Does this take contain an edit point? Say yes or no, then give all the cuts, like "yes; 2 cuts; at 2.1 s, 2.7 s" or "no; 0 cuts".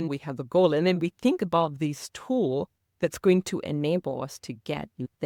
no; 0 cuts